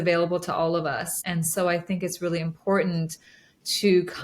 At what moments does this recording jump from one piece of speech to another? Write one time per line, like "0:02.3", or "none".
0:01.1

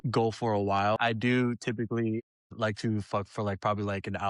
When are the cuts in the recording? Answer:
0:01.0
0:02.3

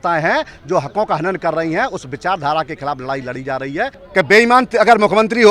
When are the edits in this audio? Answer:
0:04.0

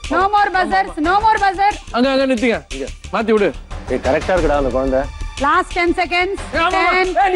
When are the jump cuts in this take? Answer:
0:01.9
0:03.7

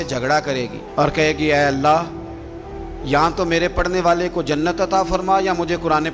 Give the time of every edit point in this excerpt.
none

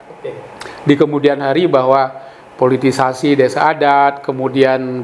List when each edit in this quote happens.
none

